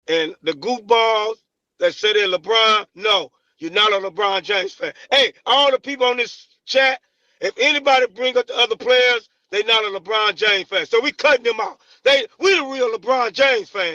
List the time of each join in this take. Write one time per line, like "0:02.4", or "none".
none